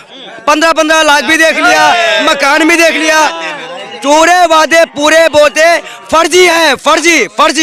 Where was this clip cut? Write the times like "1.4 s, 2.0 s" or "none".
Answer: none

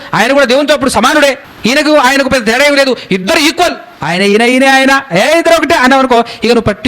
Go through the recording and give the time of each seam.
1.5 s, 3.9 s

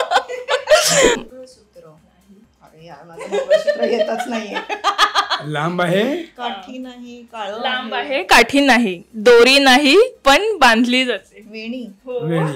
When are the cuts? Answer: 1.2 s

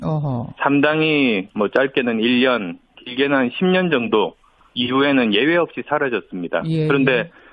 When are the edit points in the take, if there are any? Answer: 3.8 s

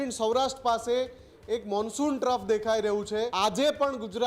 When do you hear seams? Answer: 3.3 s

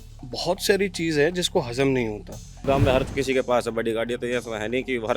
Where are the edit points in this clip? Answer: 2.6 s

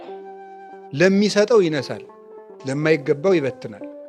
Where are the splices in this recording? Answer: none

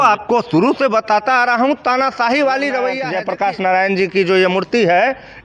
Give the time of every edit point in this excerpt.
3.1 s

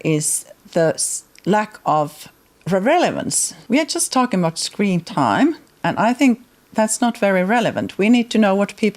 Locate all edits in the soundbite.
3.6 s, 5.7 s

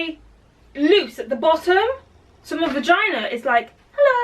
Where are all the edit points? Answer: none

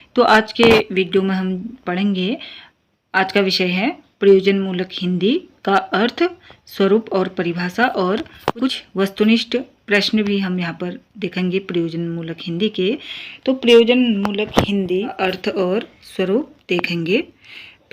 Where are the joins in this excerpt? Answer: 8.8 s, 15.1 s

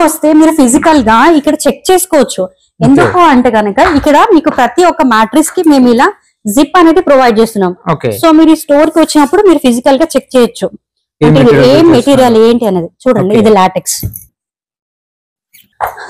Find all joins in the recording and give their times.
none

